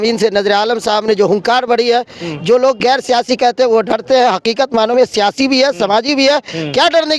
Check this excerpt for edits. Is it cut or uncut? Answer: uncut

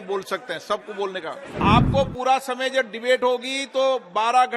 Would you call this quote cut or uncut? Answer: cut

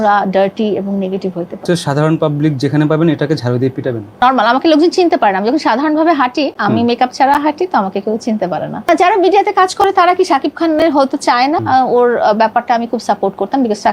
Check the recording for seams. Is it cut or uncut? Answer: cut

